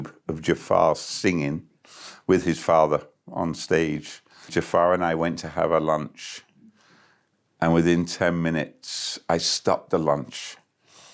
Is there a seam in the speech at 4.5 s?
yes; 1 cut; at 4.5 s

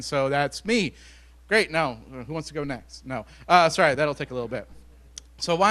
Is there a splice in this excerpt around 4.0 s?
no; 0 cuts

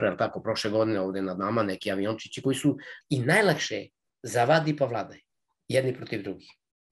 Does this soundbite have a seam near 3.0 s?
yes; 1 cut; at 3.0 s

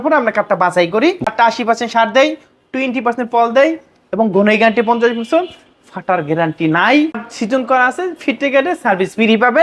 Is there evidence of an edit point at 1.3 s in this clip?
yes; 2 cuts; at 1.3 s, 7.1 s

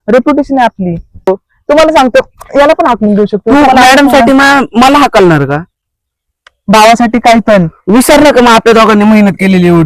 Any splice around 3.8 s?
no; 1 cut; at 1.3 s

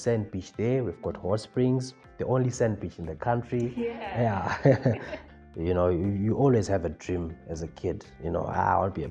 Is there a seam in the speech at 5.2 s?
yes; 1 cut; at 5.2 s

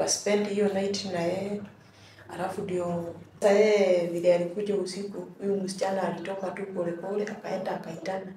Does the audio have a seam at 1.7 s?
no; 1 cut; at 3.4 s

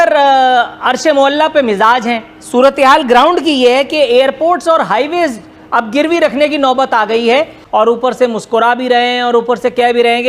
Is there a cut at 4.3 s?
no; 1 cut; at 7.6 s

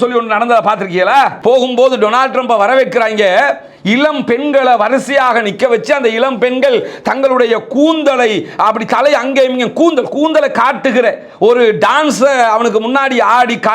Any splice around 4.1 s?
no; 1 cut; at 1.4 s

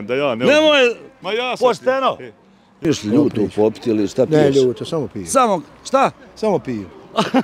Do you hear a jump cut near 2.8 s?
yes; 1 cut; at 2.8 s

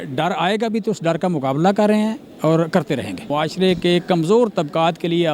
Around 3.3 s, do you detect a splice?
yes; 1 cut; at 3.3 s

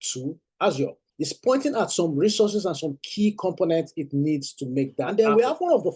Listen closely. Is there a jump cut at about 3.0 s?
no; 2 cuts; at 1.1 s, 5.0 s

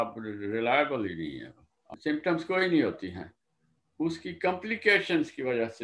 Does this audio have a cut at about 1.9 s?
yes; 1 cut; at 1.9 s

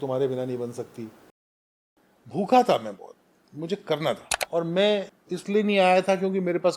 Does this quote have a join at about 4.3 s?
yes; 3 cuts; at 1.5 s, 4.3 s, 5.2 s

